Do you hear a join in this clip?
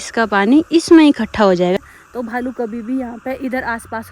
yes; 1 cut; at 1.8 s

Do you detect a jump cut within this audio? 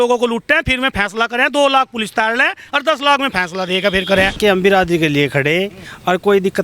yes; 1 cut; at 4.4 s

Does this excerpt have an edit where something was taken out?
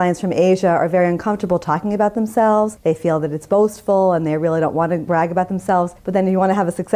yes; 3 cuts; at 2.8 s, 5.0 s, 6.0 s

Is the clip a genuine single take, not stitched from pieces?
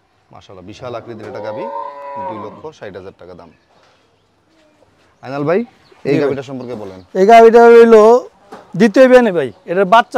yes; 0 cuts

